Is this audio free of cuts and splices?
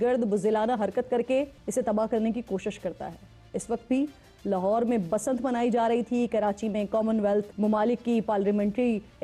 yes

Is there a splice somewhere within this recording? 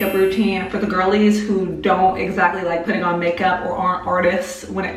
no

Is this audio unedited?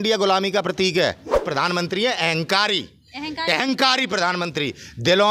no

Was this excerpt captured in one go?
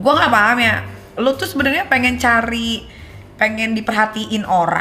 yes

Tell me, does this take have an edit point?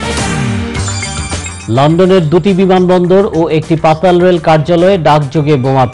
yes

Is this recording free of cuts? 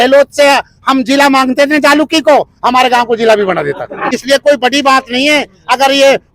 no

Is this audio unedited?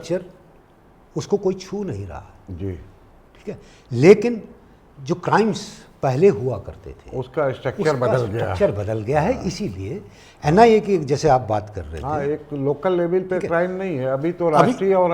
yes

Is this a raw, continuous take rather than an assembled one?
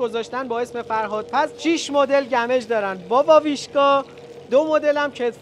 yes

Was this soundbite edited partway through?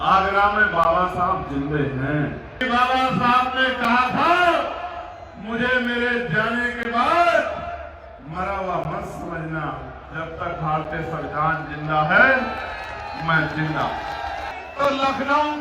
yes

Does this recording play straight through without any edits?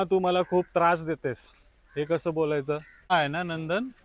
no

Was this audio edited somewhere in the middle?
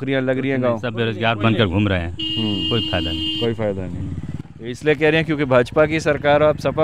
no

